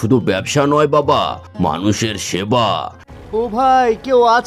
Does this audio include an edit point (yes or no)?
yes